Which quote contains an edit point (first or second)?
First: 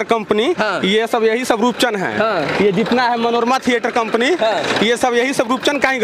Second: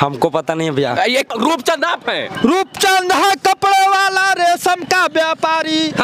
second